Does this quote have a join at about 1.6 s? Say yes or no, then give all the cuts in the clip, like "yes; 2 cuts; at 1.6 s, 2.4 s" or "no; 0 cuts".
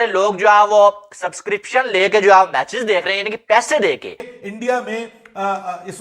no; 1 cut; at 4.4 s